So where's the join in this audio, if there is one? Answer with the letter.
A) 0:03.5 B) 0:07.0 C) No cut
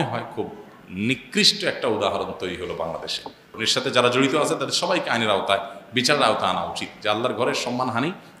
A